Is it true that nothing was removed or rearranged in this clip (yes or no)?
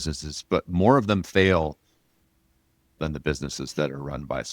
no